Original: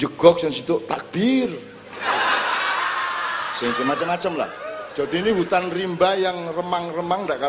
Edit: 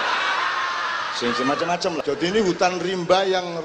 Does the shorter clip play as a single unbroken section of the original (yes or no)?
no